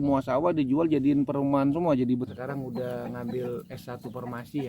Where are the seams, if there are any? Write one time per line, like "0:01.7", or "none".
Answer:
0:02.3